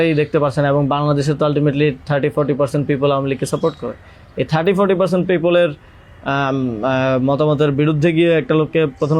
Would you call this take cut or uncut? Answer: uncut